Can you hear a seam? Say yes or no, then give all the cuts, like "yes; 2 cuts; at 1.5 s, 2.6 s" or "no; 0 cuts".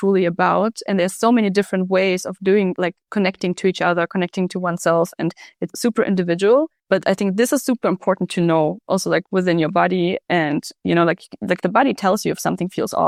no; 0 cuts